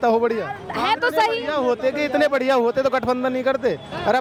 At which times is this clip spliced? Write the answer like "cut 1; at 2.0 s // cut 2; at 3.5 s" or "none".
none